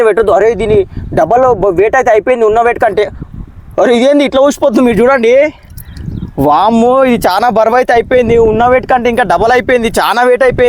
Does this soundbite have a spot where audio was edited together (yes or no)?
no